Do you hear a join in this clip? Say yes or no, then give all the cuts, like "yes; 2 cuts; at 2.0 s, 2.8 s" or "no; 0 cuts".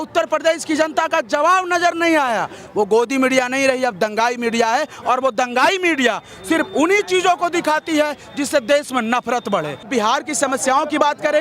yes; 2 cuts; at 2.6 s, 9.9 s